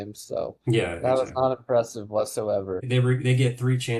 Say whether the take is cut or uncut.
cut